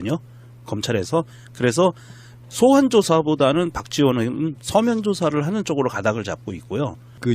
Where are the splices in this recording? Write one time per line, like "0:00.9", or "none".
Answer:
none